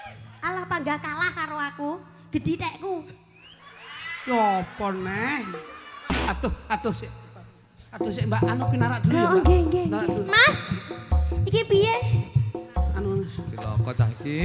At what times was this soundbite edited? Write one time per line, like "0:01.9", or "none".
0:06.1